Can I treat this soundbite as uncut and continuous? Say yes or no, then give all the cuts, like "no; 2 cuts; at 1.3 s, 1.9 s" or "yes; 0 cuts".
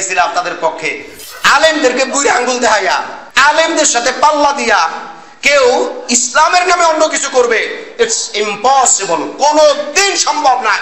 no; 1 cut; at 1.1 s